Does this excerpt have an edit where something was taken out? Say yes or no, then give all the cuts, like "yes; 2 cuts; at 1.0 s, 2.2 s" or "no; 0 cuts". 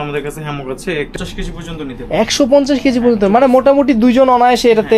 yes; 1 cut; at 1.1 s